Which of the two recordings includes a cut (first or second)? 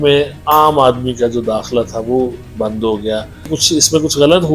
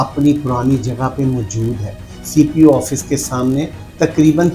first